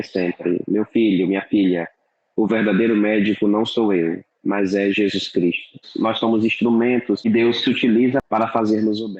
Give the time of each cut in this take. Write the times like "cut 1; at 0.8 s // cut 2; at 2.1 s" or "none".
cut 1; at 5.9 s // cut 2; at 7.2 s // cut 3; at 8.2 s